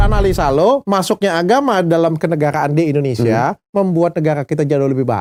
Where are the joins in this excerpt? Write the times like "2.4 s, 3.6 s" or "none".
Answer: none